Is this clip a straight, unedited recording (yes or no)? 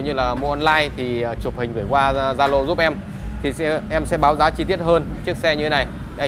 yes